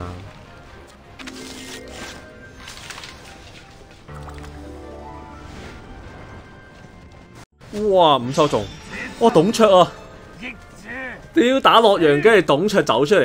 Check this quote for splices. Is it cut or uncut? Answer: uncut